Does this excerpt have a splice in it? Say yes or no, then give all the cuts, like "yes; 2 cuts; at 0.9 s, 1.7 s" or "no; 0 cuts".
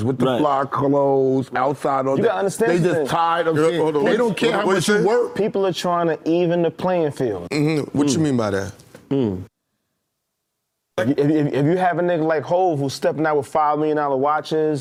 no; 0 cuts